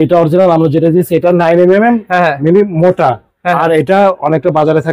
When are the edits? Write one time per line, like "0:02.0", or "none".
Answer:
none

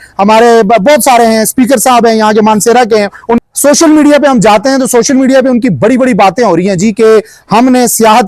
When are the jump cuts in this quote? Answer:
0:03.4

